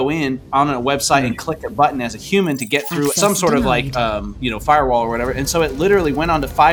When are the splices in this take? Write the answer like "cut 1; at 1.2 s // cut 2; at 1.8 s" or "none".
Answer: none